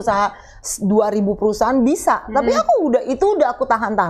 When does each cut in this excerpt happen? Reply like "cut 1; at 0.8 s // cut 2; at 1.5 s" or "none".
none